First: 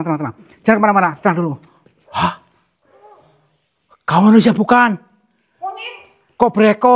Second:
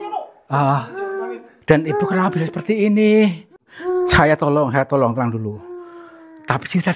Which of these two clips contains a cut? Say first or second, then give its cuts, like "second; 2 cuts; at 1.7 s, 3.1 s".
second; 1 cut; at 3.5 s